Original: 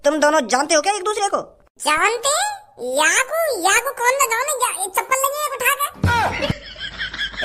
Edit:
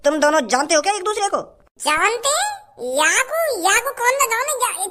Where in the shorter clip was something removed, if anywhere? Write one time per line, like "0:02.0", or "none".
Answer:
none